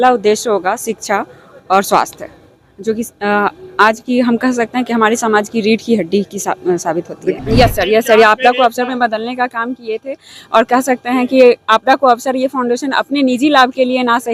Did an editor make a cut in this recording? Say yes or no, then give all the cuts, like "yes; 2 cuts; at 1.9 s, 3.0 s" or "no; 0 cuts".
yes; 1 cut; at 7.4 s